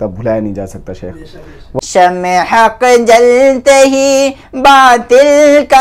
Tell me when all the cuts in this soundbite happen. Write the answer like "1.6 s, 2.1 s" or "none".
1.6 s